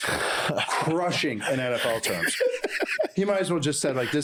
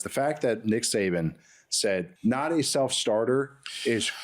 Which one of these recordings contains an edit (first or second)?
second